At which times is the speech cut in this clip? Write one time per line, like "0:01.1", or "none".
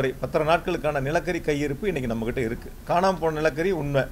0:02.8